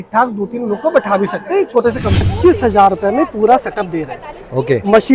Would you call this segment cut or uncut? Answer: cut